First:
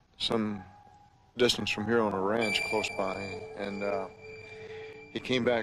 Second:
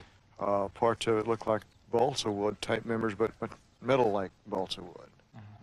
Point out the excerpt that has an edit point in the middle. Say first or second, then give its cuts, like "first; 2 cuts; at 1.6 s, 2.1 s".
second; 1 cut; at 4.7 s